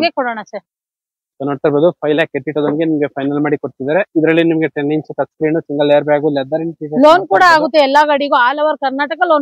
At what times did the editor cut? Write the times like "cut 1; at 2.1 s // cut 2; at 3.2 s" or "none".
none